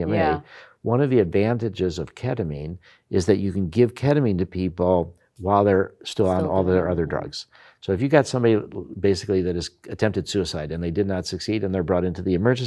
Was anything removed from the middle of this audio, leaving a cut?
no; 0 cuts

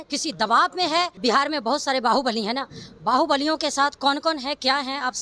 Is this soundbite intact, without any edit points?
no; 1 cut; at 1.1 s

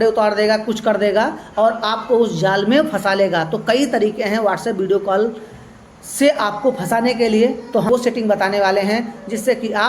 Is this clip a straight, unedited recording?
no; 1 cut; at 7.9 s

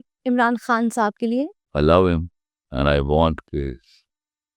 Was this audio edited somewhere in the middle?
yes; 1 cut; at 1.6 s

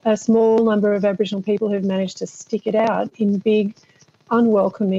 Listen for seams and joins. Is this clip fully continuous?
yes; 0 cuts

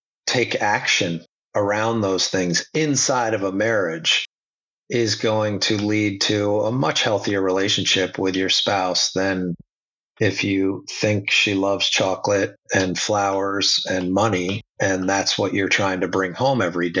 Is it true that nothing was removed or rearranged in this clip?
yes; 0 cuts

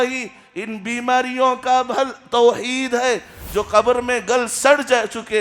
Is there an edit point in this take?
yes; 1 cut; at 3.4 s

